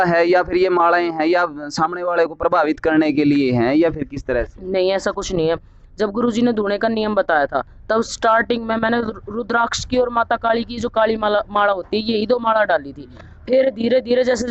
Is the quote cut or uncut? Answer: uncut